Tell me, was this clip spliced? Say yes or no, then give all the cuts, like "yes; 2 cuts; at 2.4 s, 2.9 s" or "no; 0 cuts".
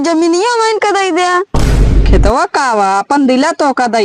yes; 1 cut; at 2.0 s